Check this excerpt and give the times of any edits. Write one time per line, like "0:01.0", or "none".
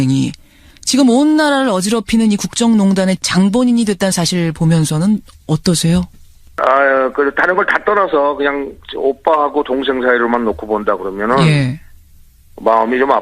0:03.3